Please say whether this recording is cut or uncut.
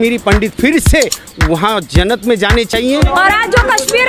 cut